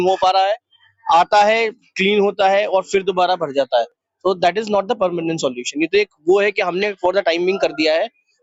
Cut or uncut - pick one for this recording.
uncut